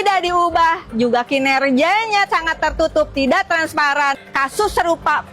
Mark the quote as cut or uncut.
cut